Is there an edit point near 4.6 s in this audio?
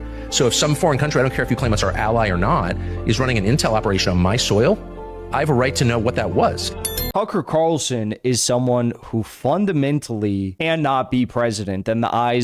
no; 2 cuts; at 7.0 s, 10.5 s

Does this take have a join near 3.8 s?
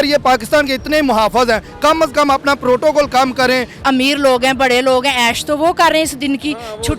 yes; 1 cut; at 3.8 s

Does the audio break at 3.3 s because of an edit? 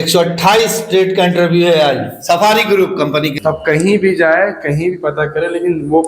yes; 1 cut; at 3.3 s

